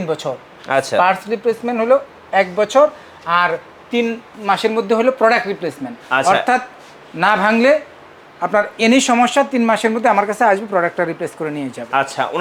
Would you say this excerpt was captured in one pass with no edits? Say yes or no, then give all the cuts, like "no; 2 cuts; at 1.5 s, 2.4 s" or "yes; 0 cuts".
yes; 0 cuts